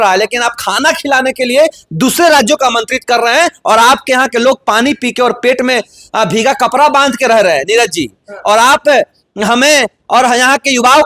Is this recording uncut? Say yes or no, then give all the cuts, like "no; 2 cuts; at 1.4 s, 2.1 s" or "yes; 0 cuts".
yes; 0 cuts